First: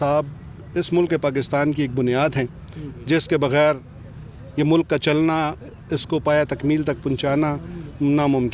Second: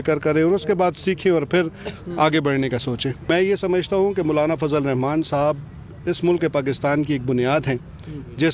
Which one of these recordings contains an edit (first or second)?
second